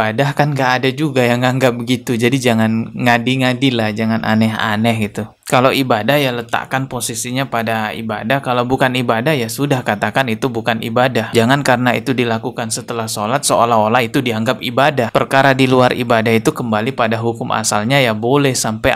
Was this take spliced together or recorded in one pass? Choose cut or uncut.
uncut